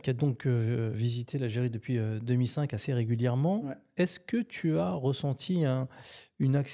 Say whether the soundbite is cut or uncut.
uncut